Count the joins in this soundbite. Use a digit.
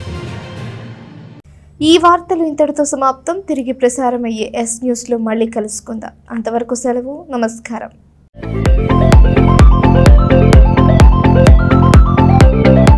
0